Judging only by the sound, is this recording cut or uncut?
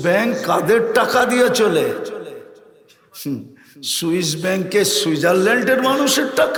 uncut